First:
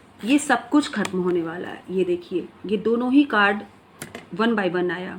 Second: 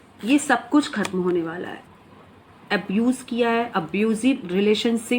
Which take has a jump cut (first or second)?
second